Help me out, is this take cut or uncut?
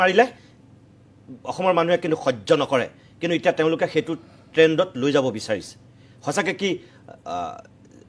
uncut